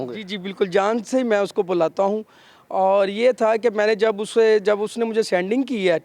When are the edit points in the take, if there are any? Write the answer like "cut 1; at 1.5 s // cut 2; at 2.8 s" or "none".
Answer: none